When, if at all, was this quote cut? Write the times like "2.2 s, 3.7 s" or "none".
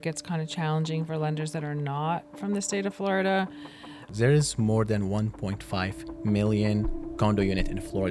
4.0 s